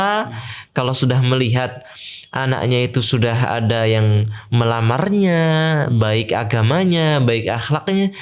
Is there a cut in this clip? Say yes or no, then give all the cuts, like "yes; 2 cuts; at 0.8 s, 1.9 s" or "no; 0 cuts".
no; 0 cuts